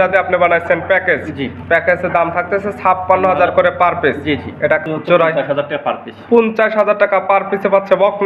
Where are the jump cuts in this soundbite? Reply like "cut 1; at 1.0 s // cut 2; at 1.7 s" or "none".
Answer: cut 1; at 4.8 s